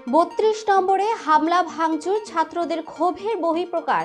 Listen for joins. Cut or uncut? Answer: uncut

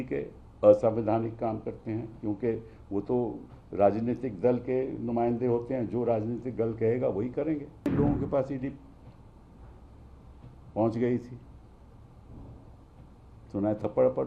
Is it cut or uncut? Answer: cut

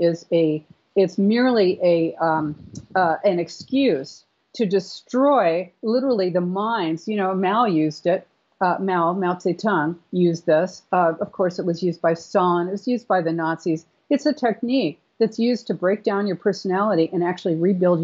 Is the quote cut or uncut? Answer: uncut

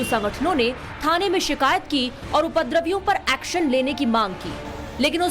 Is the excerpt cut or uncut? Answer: uncut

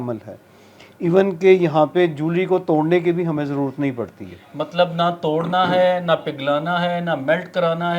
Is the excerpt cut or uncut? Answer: uncut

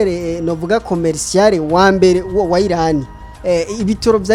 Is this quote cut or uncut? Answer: uncut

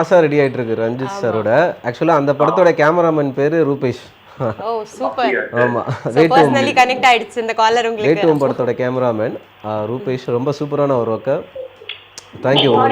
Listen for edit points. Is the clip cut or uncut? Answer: uncut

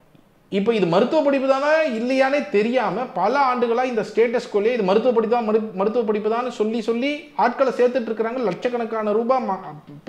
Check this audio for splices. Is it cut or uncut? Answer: uncut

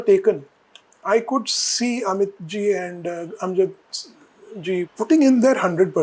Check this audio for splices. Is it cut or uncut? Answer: cut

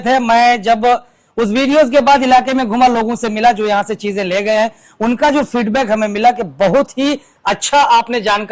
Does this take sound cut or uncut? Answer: uncut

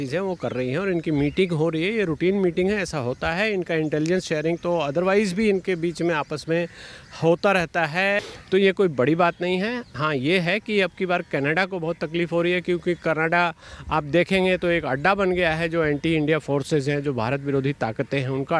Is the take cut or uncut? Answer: cut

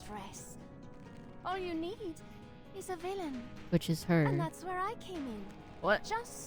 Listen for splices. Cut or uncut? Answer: uncut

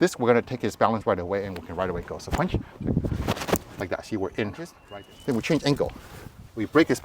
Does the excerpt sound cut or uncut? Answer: cut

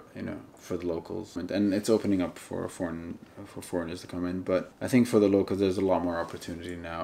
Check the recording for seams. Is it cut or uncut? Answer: cut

